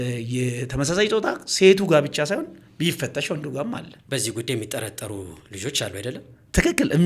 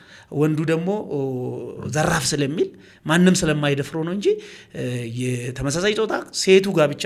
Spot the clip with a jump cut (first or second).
first